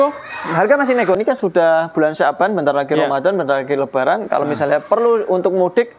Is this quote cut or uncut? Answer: cut